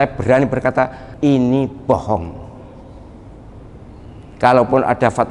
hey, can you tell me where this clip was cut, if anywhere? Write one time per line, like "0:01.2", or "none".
0:01.0

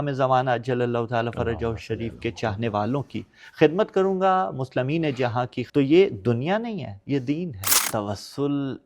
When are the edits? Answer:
0:07.7

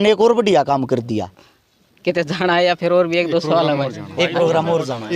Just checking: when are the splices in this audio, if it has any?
0:01.4

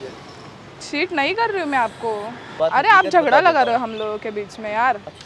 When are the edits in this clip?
0:02.5

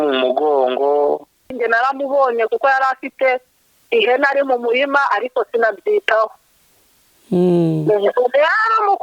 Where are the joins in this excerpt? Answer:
0:01.5

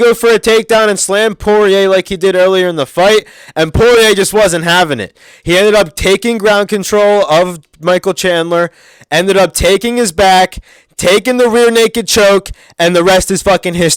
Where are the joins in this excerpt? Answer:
none

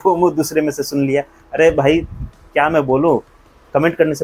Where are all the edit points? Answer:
none

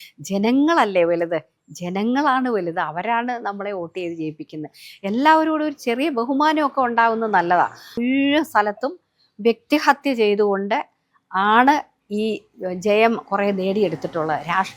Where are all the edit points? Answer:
0:08.0

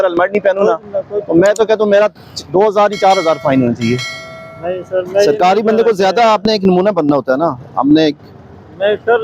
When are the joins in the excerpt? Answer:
none

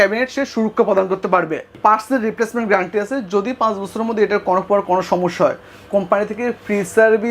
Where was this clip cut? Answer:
0:01.7

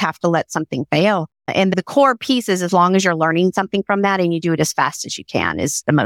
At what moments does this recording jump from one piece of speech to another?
0:01.4

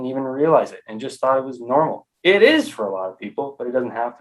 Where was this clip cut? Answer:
0:02.1

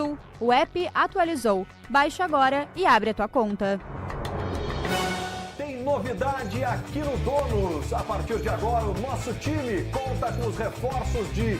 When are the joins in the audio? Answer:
0:10.1

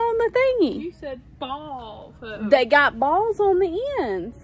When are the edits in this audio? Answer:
none

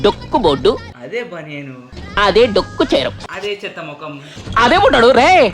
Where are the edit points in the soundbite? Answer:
0:04.3

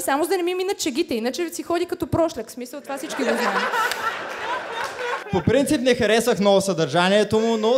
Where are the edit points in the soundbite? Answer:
0:05.2

